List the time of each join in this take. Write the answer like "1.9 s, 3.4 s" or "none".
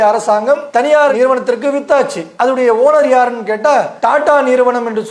1.1 s, 2.3 s